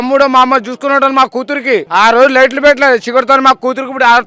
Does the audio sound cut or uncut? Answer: cut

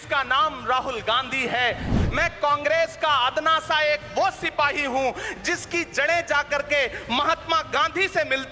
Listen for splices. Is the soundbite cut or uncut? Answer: cut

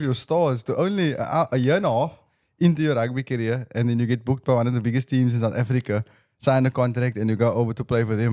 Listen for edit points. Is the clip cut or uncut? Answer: uncut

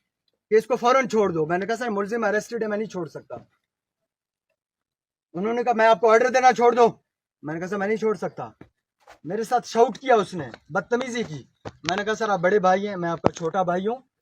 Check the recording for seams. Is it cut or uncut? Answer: uncut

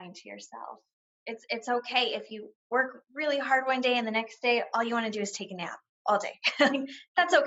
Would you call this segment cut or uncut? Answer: uncut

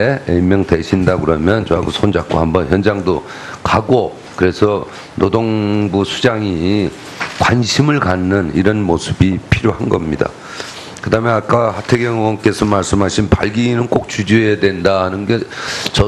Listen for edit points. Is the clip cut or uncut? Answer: uncut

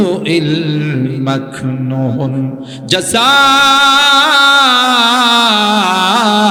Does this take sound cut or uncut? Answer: uncut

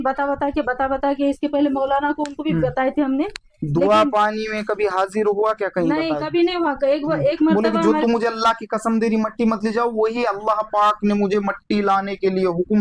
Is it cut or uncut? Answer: cut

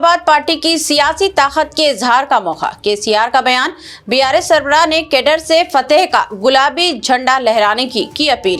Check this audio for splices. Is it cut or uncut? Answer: uncut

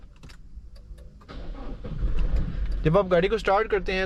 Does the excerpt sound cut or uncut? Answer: uncut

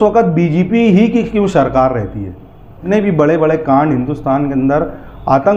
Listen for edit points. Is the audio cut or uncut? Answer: cut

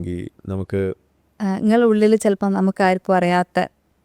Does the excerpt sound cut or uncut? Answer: cut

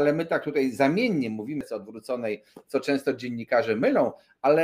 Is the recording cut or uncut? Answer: cut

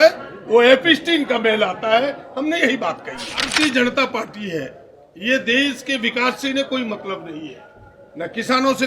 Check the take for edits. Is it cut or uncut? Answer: cut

